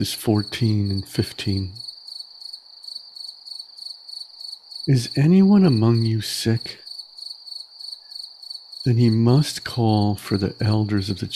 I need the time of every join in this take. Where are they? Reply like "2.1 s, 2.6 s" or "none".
1.8 s, 4.8 s, 6.9 s, 8.8 s